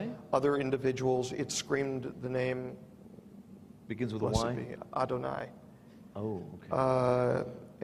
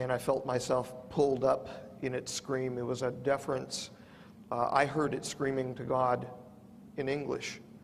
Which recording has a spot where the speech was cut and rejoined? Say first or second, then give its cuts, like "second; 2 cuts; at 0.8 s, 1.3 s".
first; 1 cut; at 6.0 s